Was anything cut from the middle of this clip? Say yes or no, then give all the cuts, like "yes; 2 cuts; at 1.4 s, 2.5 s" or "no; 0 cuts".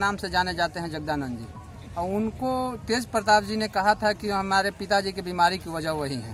no; 0 cuts